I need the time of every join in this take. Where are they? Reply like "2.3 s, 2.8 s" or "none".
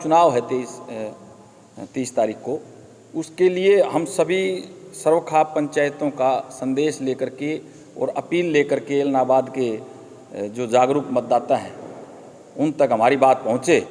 none